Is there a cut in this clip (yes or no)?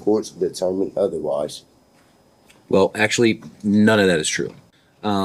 no